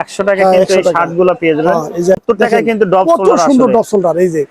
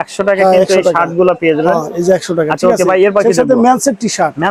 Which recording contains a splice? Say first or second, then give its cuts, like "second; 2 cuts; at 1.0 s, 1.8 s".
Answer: first; 1 cut; at 2.2 s